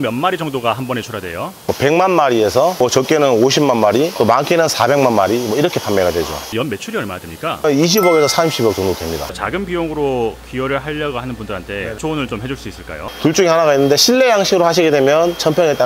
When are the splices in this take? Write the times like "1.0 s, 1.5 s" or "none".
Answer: 1.6 s, 6.5 s, 7.6 s, 9.3 s, 13.0 s